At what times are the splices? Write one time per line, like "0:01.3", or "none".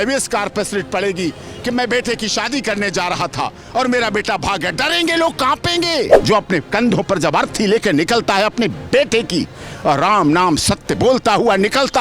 0:06.2